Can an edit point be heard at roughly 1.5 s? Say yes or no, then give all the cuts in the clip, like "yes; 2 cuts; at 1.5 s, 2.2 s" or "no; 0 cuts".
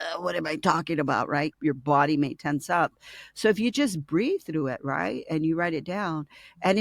yes; 1 cut; at 1.5 s